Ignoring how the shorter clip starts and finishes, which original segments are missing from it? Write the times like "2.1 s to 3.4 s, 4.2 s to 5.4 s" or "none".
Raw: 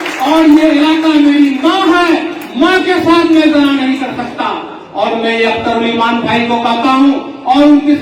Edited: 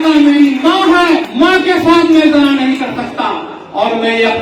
2.3 s to 2.5 s